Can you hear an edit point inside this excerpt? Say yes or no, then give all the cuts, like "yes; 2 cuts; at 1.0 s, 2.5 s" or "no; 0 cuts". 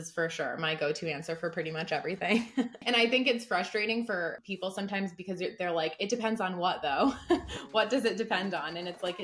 yes; 1 cut; at 2.8 s